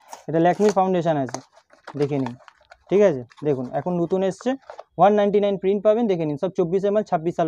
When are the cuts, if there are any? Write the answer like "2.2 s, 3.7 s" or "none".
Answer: none